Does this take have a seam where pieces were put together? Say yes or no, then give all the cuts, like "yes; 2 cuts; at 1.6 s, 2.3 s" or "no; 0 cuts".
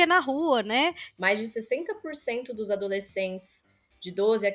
yes; 1 cut; at 1.1 s